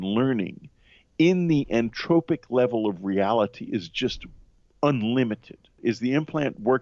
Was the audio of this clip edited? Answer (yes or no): yes